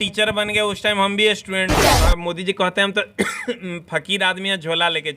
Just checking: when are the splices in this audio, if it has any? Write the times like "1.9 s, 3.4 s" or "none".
2.1 s